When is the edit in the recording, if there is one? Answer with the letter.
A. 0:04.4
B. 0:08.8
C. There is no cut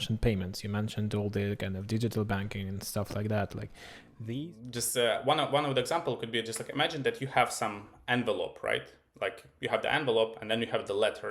A